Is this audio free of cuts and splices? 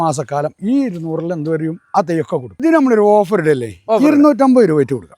no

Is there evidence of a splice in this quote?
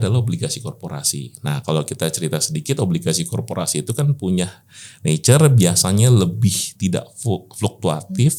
no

